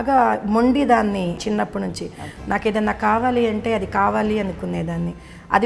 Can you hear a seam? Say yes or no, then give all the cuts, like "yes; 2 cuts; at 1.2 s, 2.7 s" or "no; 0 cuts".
yes; 1 cut; at 1.4 s